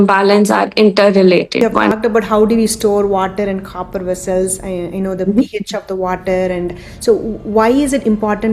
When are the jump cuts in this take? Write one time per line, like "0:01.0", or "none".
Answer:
0:01.9